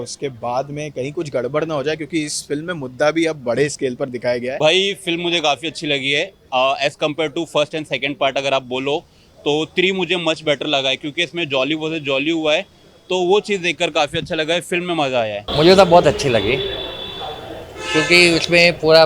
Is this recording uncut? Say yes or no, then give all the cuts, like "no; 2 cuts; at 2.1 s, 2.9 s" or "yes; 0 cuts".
no; 2 cuts; at 4.5 s, 15.4 s